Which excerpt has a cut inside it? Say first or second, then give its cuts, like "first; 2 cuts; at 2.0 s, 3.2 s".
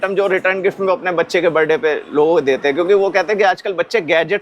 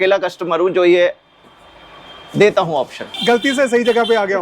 second; 1 cut; at 3.2 s